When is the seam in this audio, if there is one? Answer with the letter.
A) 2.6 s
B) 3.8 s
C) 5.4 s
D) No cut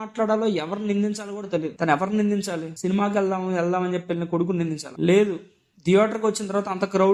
D